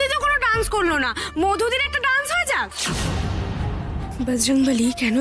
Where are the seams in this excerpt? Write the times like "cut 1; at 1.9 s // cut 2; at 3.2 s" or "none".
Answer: cut 1; at 2.8 s // cut 2; at 4.1 s